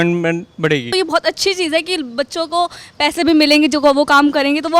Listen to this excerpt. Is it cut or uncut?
cut